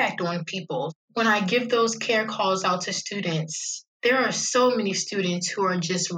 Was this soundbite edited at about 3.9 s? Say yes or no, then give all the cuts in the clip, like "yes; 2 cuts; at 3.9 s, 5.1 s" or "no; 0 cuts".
no; 1 cut; at 1.0 s